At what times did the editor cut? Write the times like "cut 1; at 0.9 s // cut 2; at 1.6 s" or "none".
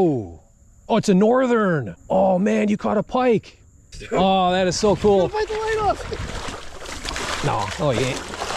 cut 1; at 1.9 s // cut 2; at 3.9 s